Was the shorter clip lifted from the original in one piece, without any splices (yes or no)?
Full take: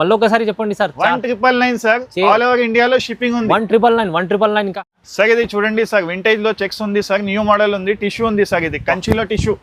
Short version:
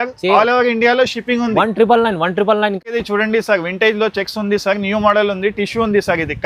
no